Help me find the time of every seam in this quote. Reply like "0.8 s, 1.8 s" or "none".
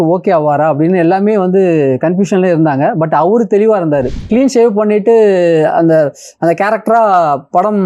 4.2 s